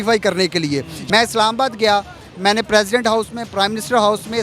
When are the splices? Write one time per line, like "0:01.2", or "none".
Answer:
0:00.9